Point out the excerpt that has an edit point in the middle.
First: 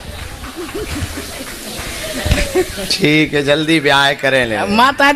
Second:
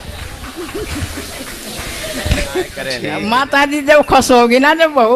second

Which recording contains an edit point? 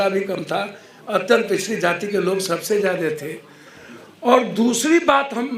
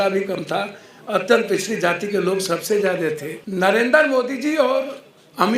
second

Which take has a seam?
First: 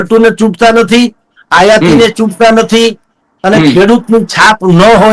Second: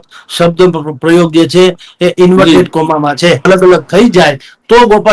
second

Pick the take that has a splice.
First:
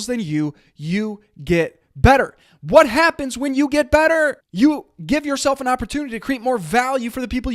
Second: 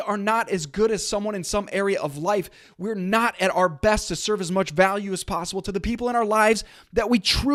first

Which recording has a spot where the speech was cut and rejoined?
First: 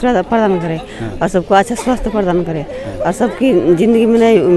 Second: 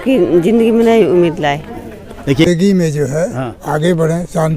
second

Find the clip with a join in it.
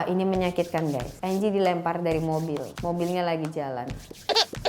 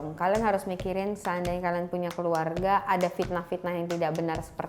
first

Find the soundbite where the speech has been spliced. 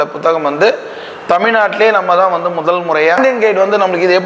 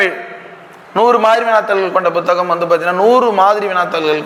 first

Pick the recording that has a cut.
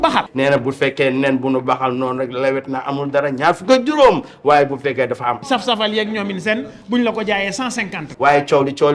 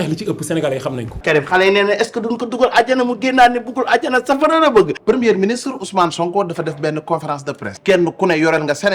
second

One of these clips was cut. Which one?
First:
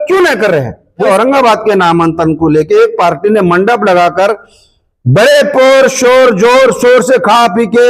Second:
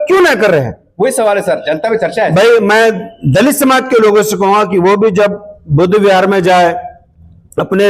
first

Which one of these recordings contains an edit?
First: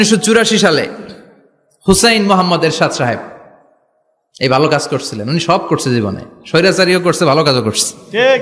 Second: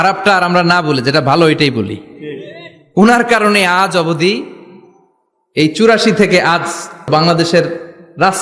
second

